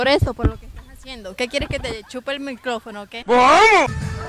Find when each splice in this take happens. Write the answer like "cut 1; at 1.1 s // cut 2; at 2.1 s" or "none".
none